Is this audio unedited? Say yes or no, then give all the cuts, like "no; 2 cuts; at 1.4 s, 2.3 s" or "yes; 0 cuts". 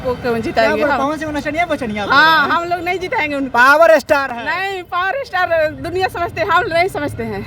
yes; 0 cuts